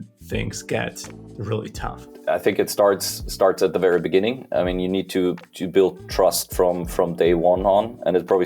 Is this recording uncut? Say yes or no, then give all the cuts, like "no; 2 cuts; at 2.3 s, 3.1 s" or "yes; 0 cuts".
no; 1 cut; at 2.1 s